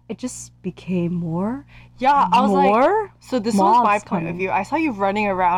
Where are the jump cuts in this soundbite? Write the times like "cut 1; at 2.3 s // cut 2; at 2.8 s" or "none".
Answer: none